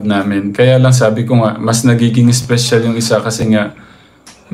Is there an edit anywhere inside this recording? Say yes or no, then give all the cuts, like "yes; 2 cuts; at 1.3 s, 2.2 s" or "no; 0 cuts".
no; 0 cuts